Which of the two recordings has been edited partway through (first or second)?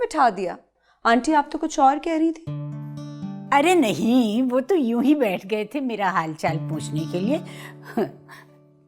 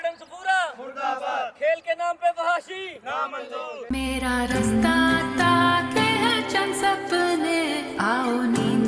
second